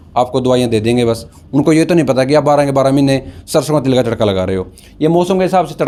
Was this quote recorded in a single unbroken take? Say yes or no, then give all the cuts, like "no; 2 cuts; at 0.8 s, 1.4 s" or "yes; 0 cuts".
yes; 0 cuts